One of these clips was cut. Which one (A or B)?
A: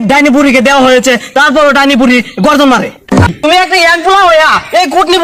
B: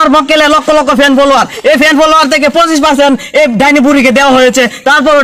A